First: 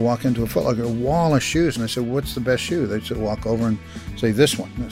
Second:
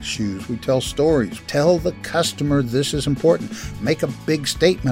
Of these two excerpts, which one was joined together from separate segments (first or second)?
second